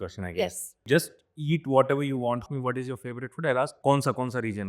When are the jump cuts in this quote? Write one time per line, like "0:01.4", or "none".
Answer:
0:00.8
0:02.5
0:03.8